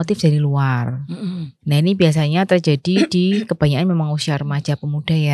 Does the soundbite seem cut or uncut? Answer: uncut